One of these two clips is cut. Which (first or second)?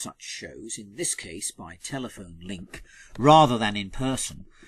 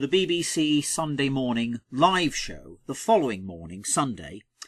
first